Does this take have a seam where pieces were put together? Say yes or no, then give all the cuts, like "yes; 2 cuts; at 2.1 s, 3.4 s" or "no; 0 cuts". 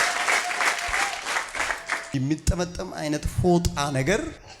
yes; 1 cut; at 2.0 s